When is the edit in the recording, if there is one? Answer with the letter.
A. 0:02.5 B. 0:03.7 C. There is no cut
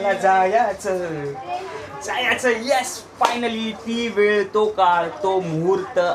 C